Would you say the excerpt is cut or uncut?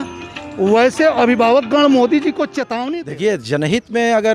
cut